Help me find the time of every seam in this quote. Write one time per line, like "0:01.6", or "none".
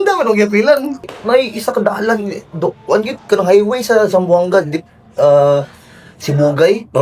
0:01.1